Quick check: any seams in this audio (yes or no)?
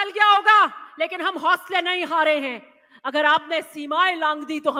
no